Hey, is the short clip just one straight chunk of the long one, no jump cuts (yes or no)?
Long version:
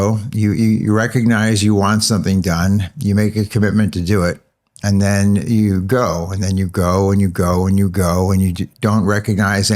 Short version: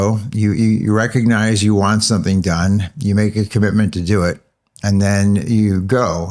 yes